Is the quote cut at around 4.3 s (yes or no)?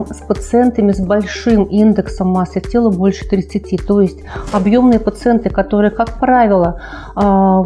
no